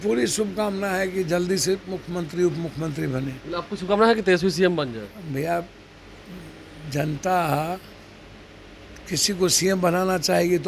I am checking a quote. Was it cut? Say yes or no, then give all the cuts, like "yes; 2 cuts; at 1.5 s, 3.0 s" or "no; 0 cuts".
no; 0 cuts